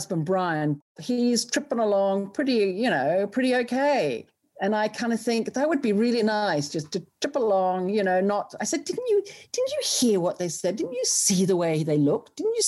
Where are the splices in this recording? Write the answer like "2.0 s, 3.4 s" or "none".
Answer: 0.9 s